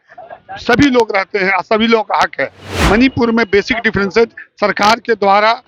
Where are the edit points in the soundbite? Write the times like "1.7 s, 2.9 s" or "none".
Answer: none